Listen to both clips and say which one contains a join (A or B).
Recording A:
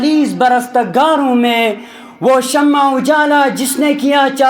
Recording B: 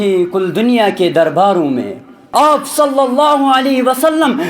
B